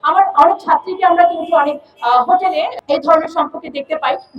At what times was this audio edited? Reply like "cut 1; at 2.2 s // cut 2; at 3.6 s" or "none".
cut 1; at 2.7 s